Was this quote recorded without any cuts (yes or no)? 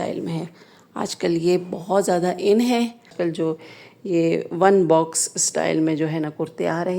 no